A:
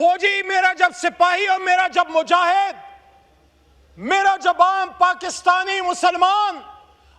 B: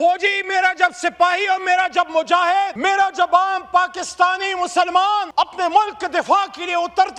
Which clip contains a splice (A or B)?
B